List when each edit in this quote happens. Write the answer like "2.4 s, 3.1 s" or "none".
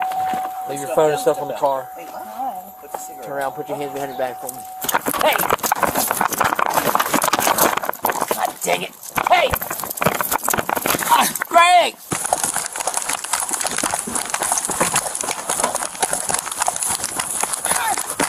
12.0 s, 13.2 s